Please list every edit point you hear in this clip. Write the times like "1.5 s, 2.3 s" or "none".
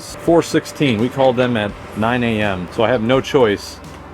2.3 s